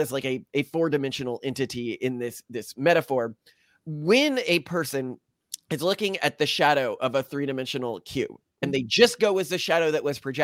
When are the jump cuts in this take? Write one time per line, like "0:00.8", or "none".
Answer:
0:03.4
0:08.6